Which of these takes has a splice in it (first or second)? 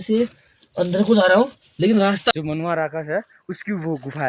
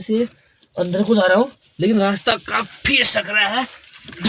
first